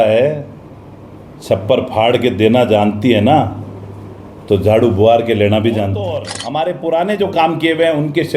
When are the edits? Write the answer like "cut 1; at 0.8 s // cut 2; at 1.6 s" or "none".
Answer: cut 1; at 6.4 s